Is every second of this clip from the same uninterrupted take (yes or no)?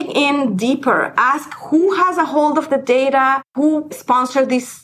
no